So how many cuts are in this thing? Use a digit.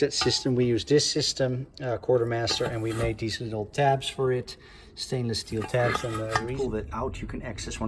1